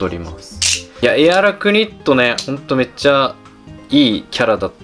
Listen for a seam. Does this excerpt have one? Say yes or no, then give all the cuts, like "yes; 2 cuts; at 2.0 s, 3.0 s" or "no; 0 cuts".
yes; 1 cut; at 1.0 s